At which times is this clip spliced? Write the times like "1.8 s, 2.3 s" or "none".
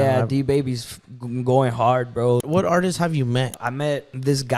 2.4 s, 3.6 s